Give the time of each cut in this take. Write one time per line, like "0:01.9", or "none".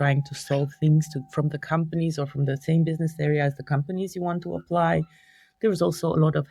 none